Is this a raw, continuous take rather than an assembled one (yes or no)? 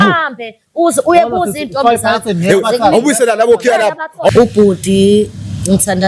no